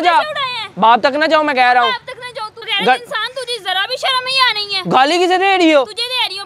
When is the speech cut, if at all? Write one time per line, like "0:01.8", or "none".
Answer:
0:02.6